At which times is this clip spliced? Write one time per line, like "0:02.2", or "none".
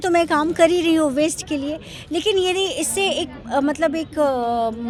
none

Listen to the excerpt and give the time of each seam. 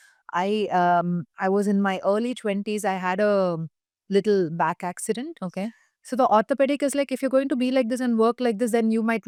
none

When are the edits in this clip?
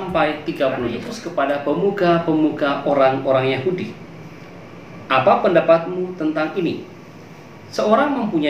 0:01.2

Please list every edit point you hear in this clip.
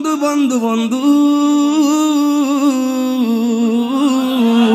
none

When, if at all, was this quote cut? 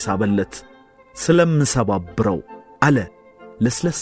0:02.6

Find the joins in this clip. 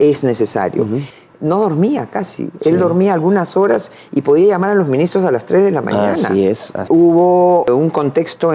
0:01.0
0:06.8
0:07.7

